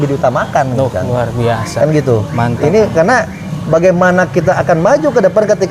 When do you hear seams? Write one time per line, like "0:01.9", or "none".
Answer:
none